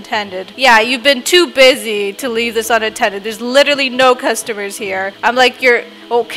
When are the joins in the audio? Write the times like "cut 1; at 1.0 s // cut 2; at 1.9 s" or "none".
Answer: cut 1; at 5.1 s